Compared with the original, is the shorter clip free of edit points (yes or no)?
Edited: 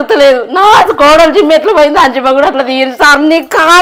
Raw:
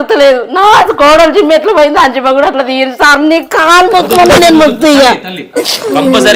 yes